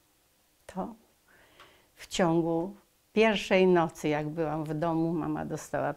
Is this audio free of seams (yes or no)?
yes